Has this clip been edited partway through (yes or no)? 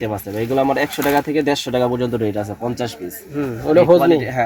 no